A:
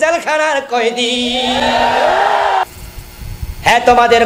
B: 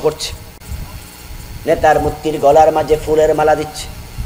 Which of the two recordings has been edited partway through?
A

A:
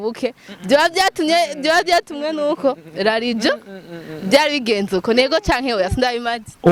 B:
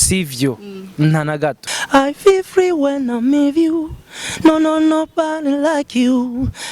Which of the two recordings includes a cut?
B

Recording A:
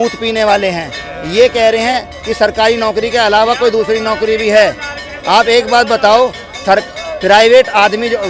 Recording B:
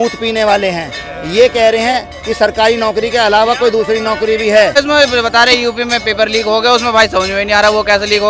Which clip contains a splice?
B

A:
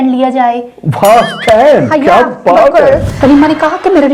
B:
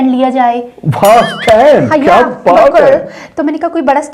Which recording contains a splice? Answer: A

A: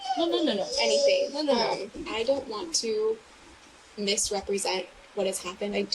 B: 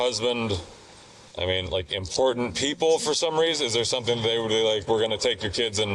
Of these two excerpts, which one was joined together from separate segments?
A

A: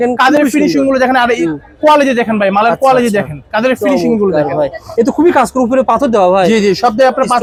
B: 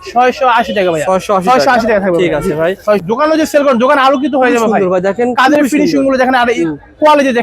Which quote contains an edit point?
B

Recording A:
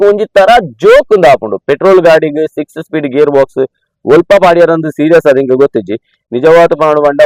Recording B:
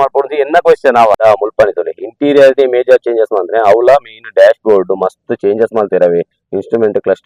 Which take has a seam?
B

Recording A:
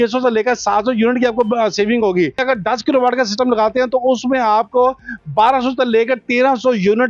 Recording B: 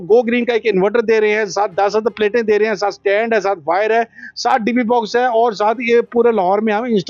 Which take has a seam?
A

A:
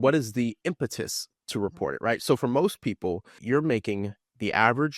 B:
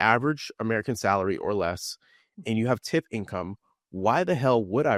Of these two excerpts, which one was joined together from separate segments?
A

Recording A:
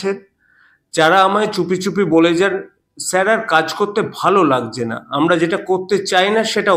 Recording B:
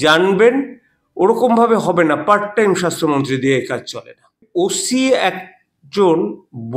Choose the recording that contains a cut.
B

